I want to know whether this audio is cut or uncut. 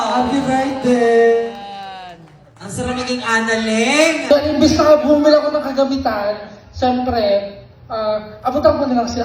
cut